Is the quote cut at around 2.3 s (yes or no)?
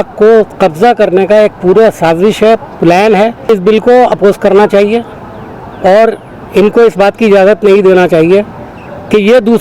no